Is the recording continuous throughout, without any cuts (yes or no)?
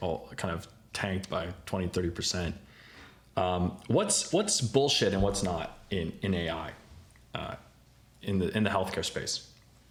yes